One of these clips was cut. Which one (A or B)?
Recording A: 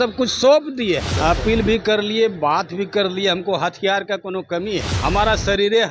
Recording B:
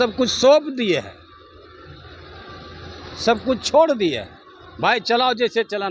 A